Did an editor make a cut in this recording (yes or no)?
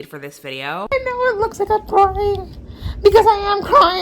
yes